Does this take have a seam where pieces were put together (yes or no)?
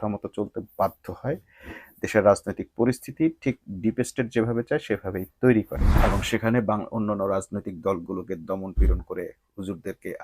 yes